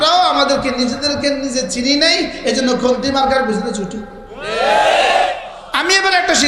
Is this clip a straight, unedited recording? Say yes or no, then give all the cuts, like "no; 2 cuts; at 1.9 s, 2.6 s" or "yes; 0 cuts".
no; 1 cut; at 5.5 s